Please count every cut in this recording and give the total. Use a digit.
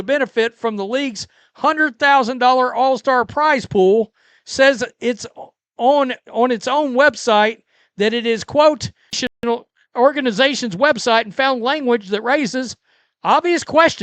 1